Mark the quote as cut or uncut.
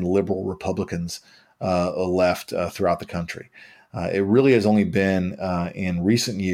uncut